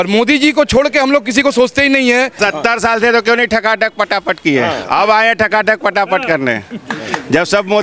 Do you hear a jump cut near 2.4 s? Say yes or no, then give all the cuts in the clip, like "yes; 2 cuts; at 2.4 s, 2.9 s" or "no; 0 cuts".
yes; 1 cut; at 2.4 s